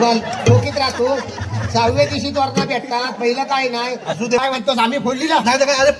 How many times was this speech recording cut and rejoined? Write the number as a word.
one